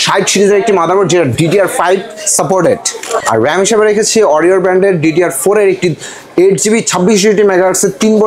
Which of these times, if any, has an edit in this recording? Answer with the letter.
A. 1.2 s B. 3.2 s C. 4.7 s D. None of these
B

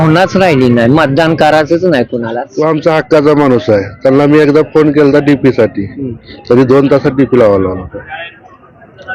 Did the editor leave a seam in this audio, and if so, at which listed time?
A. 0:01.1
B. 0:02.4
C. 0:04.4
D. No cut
B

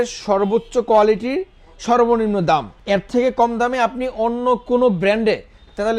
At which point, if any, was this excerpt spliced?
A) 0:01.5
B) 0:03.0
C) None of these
C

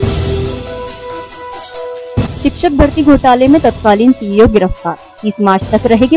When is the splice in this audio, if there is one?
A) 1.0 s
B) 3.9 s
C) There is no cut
A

